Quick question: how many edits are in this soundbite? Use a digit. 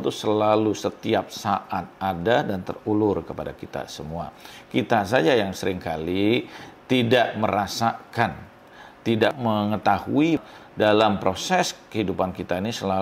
2